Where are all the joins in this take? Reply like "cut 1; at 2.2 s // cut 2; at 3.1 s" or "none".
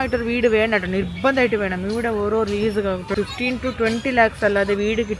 cut 1; at 3.1 s